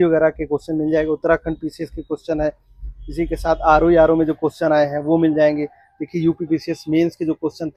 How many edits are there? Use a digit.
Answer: 0